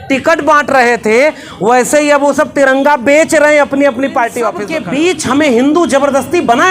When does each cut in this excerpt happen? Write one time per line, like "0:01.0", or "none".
0:04.7